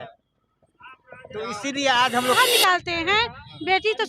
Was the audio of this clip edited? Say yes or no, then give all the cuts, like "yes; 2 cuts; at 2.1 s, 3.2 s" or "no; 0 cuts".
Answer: yes; 1 cut; at 2.4 s